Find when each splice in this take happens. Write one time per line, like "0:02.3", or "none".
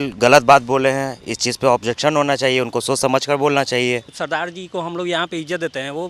0:04.1